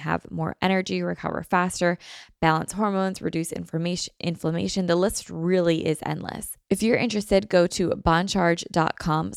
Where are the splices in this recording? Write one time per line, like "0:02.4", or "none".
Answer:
0:06.5